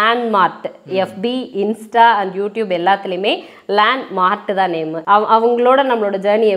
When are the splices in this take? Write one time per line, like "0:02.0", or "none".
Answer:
0:05.0

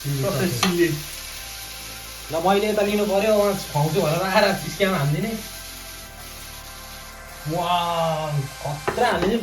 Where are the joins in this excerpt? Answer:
none

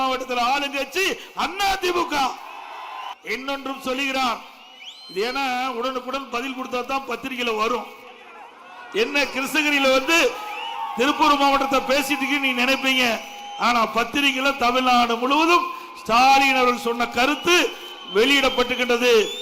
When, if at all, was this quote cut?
0:03.1

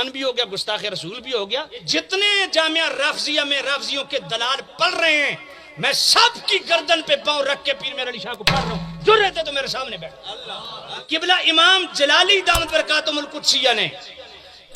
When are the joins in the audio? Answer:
0:01.9
0:10.8

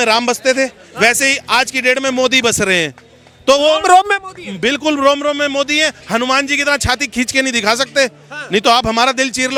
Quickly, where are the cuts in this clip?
none

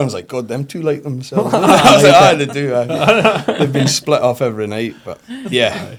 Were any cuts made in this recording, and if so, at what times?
none

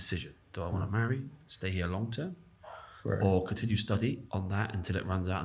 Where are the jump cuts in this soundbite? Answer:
0:04.2

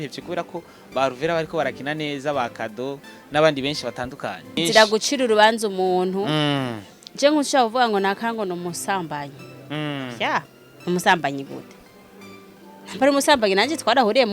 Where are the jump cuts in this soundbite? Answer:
0:04.6

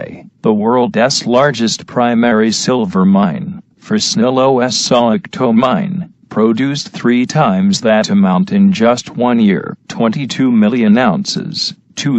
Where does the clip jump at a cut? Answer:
none

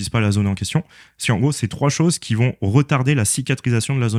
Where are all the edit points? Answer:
none

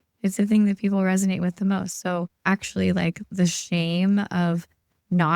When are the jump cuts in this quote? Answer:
0:02.3

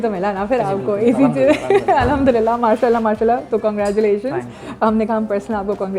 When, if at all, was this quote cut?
none

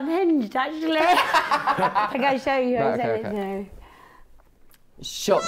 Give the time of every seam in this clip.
0:02.1

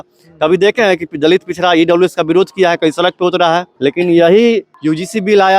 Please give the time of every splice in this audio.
0:03.7
0:04.7

